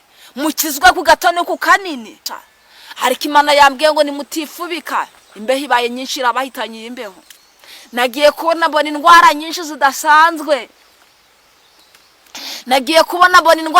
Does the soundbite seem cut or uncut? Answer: cut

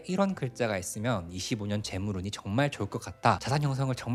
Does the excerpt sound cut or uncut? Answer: uncut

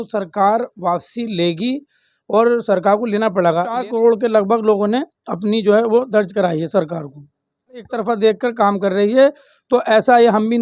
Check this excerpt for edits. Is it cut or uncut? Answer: cut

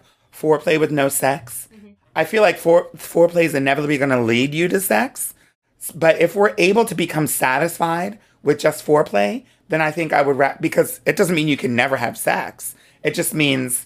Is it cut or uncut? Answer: uncut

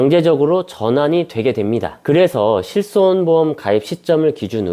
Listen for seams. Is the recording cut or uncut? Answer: uncut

